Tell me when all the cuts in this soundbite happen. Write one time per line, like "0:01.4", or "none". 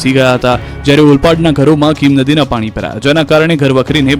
0:01.5

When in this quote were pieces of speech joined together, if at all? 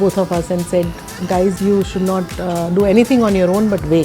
0:01.6

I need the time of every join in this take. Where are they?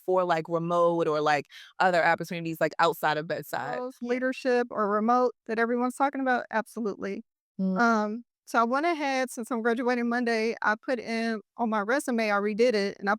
0:04.0

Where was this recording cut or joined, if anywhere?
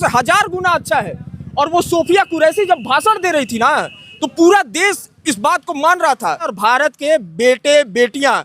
0:06.5

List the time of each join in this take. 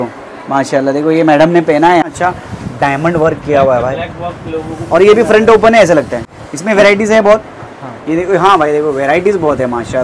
0:02.1
0:06.2

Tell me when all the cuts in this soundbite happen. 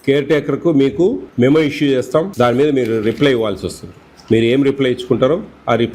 0:01.2
0:02.3

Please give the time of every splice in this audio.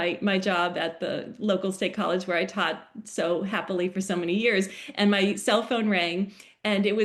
none

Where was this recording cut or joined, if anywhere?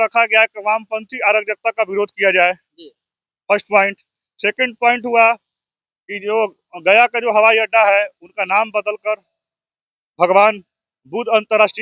none

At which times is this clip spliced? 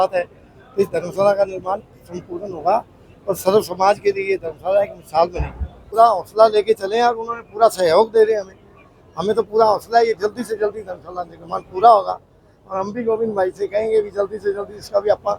0:05.8

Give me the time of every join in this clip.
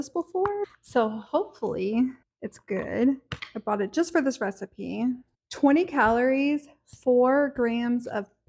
0:05.4

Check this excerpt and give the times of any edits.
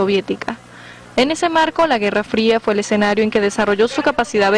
0:01.7

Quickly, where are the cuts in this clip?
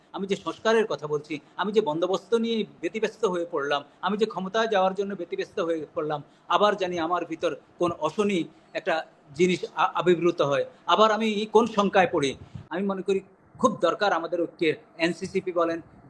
0:12.5

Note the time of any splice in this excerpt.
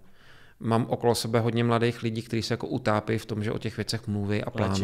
none

